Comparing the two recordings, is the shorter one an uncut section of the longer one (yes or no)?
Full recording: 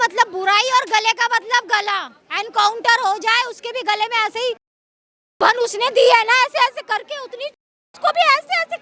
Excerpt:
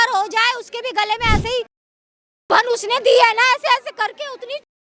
yes